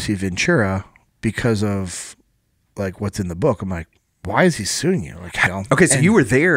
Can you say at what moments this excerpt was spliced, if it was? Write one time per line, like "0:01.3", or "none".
0:05.5